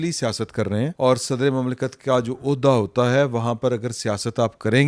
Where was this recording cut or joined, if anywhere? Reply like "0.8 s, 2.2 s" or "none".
0.9 s